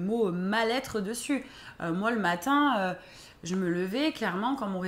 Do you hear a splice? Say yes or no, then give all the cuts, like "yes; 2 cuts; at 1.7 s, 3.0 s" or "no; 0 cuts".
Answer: no; 0 cuts